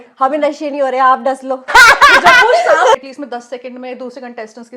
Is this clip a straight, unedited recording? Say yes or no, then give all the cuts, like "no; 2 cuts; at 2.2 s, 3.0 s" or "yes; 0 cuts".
no; 2 cuts; at 1.7 s, 3.0 s